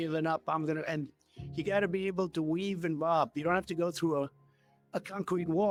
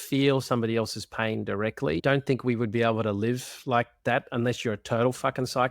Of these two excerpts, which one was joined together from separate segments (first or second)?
second